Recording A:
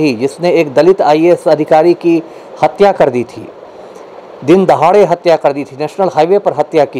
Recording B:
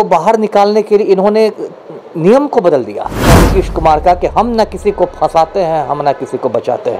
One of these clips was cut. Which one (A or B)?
B